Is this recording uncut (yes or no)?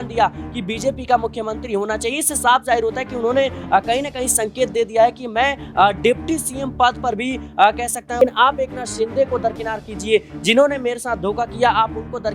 no